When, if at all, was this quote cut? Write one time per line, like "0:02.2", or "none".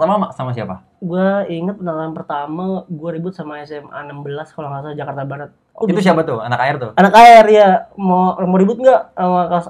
0:05.8